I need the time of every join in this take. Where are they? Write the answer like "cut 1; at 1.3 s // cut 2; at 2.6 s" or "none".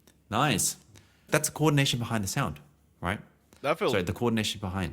cut 1; at 1.3 s